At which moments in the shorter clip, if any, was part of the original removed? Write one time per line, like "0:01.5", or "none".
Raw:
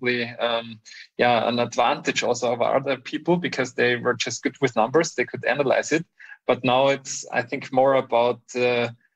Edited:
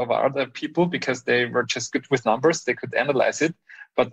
none

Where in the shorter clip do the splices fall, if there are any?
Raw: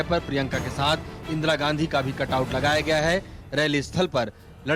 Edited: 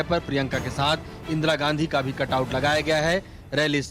none

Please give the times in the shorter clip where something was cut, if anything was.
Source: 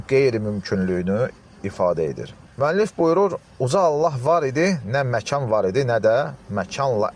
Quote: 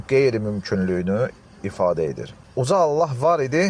0:02.4

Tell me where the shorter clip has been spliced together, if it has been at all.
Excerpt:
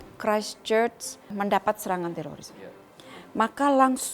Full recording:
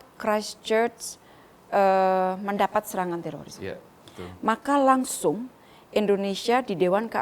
0:01.3

